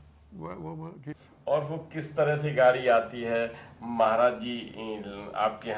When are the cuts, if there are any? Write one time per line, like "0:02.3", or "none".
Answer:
0:01.1